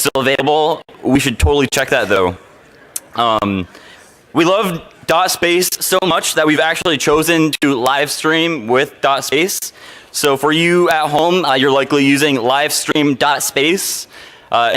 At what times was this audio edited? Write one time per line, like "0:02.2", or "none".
none